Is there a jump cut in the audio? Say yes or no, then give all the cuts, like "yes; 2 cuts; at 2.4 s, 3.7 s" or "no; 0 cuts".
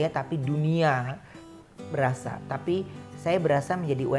no; 0 cuts